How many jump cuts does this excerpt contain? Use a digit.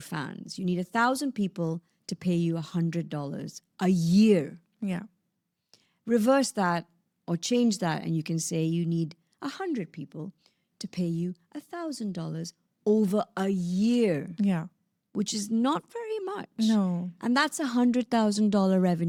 0